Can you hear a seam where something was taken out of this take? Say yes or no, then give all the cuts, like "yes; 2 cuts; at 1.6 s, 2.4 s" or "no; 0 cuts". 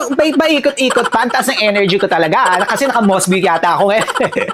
no; 0 cuts